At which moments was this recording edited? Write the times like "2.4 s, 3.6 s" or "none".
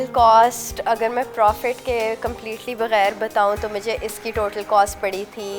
none